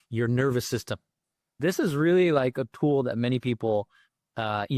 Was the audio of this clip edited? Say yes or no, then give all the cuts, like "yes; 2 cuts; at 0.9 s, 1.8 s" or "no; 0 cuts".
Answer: yes; 1 cut; at 1.6 s